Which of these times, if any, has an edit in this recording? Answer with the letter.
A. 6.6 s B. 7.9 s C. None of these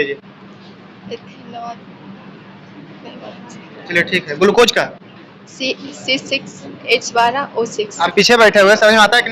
B